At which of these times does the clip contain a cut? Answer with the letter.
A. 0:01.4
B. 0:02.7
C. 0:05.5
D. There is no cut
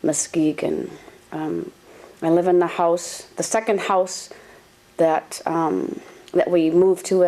C